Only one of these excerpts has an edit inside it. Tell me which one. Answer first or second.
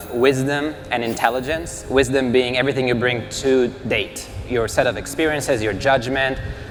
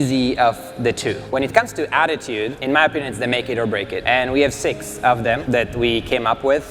second